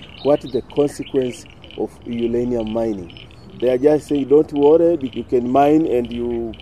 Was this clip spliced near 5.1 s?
yes; 1 cut; at 5.1 s

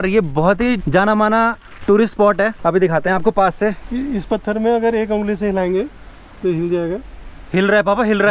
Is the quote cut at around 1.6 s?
no; 0 cuts

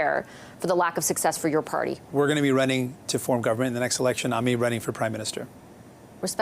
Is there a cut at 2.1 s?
yes; 1 cut; at 2.1 s

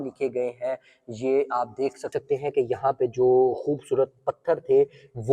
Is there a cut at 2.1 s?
yes; 1 cut; at 2.1 s

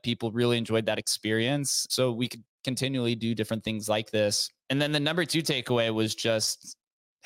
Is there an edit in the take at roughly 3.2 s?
no; 2 cuts; at 1.9 s, 4.6 s

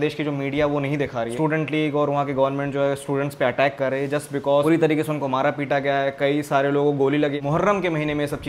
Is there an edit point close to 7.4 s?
yes; 3 cuts; at 1.3 s, 4.6 s, 7.4 s

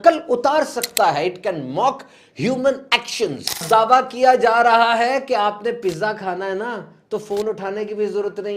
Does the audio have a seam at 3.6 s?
yes; 1 cut; at 3.6 s

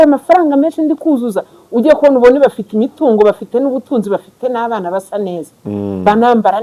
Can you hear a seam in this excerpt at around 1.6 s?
no; 0 cuts

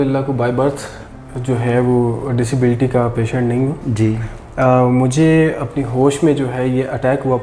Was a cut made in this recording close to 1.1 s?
no; 0 cuts

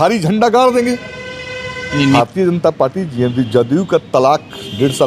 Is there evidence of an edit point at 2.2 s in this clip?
yes; 1 cut; at 2.2 s

